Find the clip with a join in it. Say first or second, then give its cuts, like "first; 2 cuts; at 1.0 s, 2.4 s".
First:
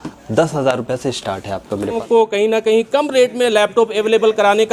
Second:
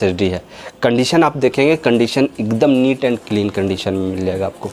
first; 1 cut; at 2.0 s